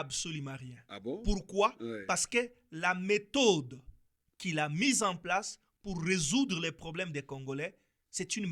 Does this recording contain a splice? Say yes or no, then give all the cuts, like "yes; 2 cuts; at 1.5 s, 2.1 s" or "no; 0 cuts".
no; 0 cuts